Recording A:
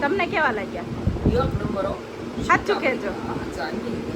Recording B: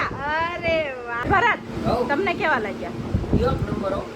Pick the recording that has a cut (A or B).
B